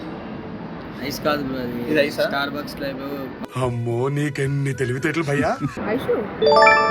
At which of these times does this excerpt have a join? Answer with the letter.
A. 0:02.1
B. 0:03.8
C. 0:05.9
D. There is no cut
C